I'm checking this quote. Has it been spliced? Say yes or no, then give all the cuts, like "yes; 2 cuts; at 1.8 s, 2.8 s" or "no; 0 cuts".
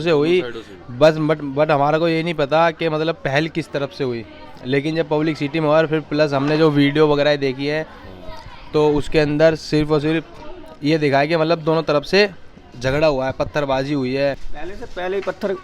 yes; 1 cut; at 14.4 s